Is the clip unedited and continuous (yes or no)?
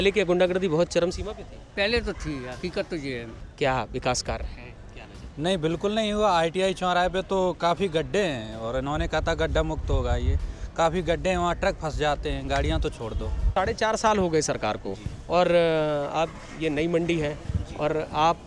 no